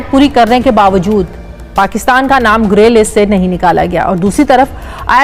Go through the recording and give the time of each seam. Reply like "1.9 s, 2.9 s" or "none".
4.1 s